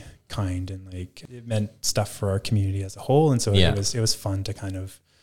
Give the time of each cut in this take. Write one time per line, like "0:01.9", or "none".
0:01.1